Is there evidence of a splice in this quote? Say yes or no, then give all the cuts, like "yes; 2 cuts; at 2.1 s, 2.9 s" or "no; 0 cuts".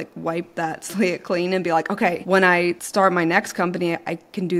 yes; 1 cut; at 2.3 s